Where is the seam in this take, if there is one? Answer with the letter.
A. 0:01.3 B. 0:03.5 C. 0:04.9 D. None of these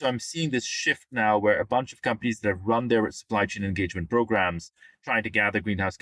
D